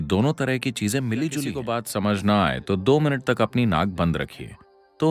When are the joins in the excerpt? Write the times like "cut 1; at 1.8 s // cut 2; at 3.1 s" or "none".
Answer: cut 1; at 1.8 s